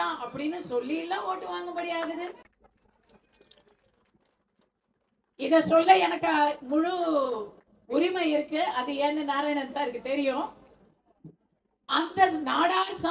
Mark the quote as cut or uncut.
uncut